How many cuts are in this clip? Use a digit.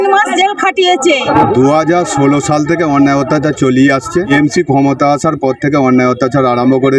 2